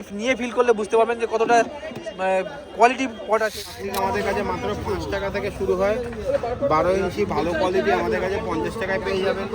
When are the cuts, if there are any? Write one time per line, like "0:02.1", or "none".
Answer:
0:03.7